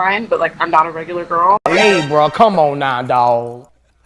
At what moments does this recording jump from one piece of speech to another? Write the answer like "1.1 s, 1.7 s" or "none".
none